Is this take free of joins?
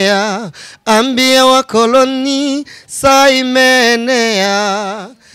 yes; 0 cuts

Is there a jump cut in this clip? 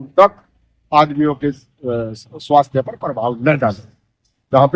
no; 0 cuts

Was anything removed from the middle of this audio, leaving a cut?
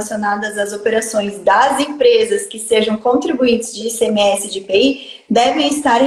no; 0 cuts

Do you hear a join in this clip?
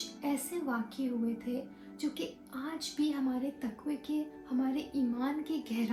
no; 0 cuts

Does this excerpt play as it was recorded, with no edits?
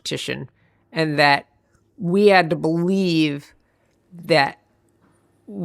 yes; 0 cuts

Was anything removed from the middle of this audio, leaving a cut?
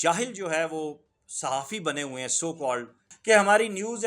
yes; 1 cut; at 3.1 s

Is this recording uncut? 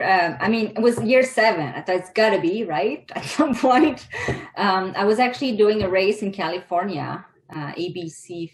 yes; 0 cuts

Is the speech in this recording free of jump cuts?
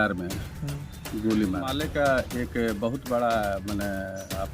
no; 1 cut; at 1.8 s

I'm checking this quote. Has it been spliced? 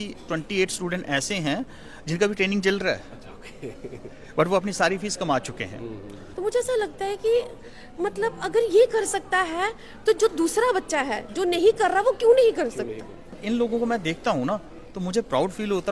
yes; 2 cuts; at 6.2 s, 13.3 s

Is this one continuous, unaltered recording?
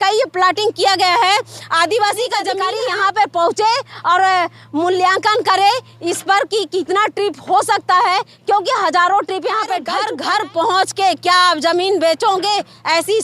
no; 2 cuts; at 2.6 s, 9.9 s

